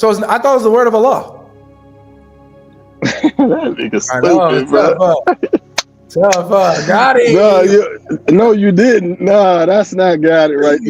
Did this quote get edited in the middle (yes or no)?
no